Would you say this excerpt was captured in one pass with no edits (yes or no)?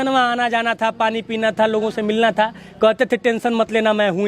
yes